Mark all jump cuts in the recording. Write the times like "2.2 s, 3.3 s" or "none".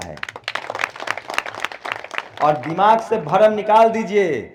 none